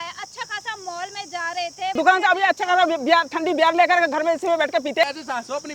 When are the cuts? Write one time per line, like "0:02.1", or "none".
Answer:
0:01.9
0:05.0